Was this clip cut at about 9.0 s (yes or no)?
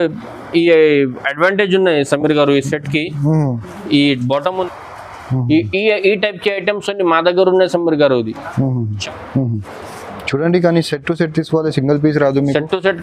yes